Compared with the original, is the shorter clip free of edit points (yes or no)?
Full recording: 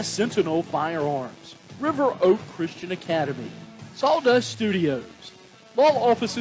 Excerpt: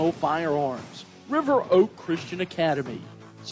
yes